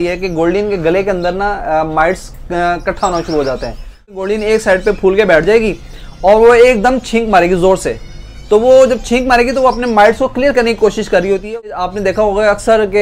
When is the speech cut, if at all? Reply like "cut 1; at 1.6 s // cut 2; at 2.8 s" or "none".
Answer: cut 1; at 4.2 s // cut 2; at 11.8 s

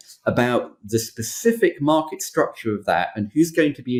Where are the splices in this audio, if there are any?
none

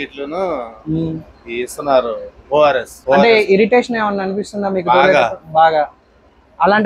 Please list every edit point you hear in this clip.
cut 1; at 2.9 s

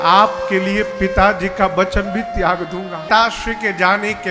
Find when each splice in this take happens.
cut 1; at 3.1 s

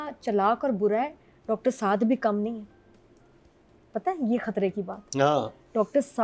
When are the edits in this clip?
none

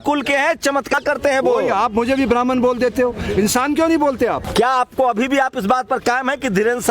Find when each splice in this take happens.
cut 1; at 1.0 s // cut 2; at 4.4 s

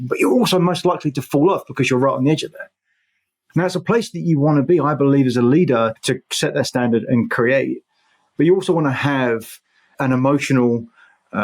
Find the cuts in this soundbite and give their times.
cut 1; at 6.0 s // cut 2; at 9.9 s

